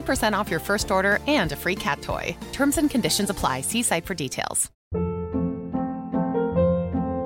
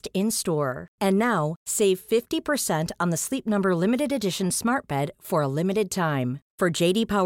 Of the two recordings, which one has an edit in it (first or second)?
first